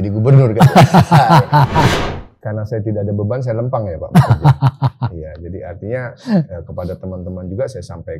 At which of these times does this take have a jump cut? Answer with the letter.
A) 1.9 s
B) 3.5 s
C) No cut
A